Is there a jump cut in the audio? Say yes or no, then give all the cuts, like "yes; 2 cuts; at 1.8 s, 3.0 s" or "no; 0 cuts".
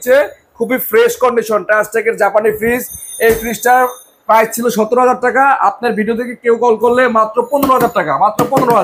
no; 0 cuts